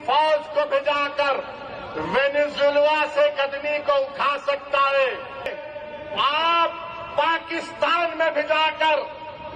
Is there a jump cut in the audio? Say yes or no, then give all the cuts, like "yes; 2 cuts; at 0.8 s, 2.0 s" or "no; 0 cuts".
yes; 1 cut; at 5.5 s